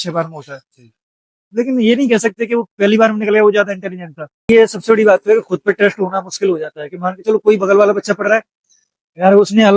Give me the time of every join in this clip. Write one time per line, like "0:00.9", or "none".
0:04.5